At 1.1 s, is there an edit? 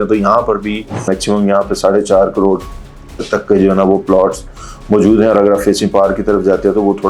yes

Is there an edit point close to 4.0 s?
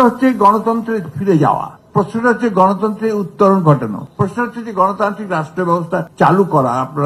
yes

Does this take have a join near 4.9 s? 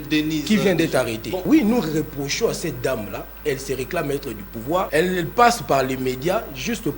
yes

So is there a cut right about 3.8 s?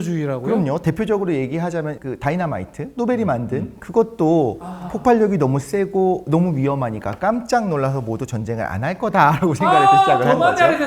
no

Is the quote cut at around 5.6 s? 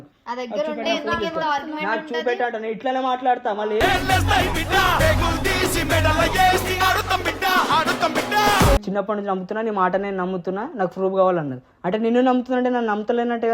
no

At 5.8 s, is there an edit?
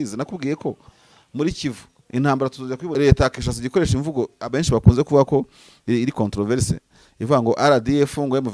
no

